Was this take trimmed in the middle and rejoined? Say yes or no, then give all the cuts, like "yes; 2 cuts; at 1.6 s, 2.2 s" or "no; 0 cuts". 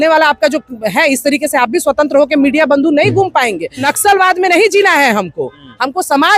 yes; 1 cut; at 3.9 s